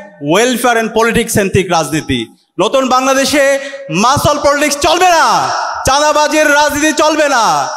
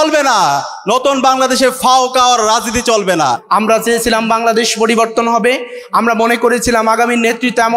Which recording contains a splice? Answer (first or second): second